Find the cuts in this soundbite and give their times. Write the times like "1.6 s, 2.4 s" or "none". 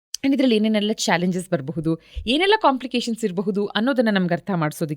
none